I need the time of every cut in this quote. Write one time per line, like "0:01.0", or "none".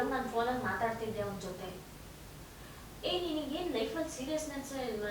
none